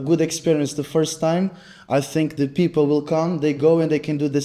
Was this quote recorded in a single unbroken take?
yes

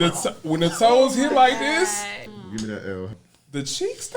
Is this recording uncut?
no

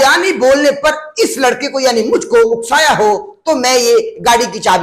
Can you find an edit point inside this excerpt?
no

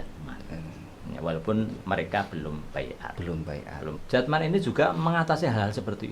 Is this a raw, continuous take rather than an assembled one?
no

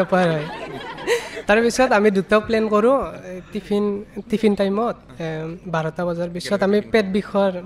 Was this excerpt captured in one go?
yes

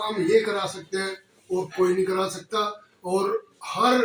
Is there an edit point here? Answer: no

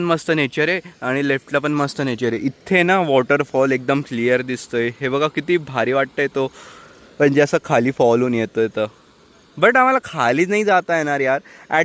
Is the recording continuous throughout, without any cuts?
yes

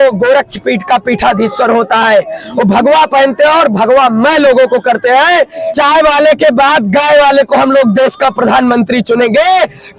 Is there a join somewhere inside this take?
yes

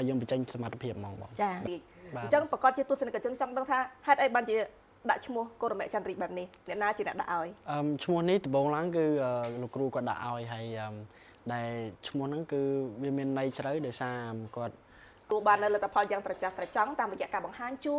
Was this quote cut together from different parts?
yes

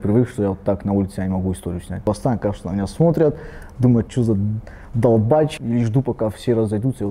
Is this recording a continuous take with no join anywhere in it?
no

